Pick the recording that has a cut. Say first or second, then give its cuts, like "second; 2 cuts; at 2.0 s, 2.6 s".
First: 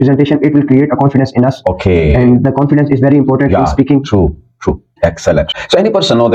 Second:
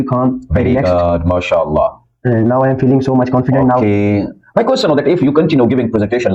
first; 1 cut; at 4.9 s